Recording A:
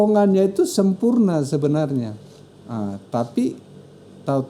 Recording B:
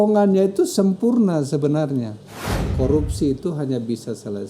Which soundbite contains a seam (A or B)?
B